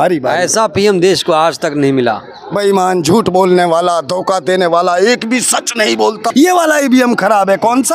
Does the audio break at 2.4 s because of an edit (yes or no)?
no